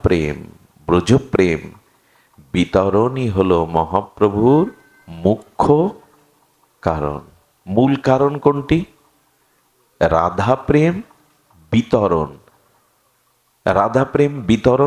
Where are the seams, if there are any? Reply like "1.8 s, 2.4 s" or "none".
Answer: none